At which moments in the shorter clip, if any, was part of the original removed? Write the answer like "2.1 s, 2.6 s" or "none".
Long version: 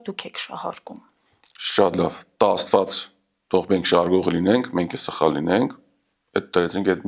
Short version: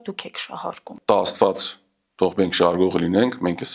0.9 s